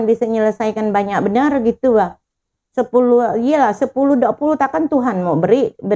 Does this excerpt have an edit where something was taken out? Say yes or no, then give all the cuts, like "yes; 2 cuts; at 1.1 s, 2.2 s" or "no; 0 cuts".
no; 0 cuts